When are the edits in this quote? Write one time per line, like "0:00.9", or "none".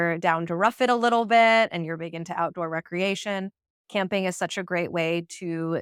none